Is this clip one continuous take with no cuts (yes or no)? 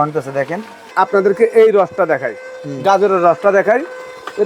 no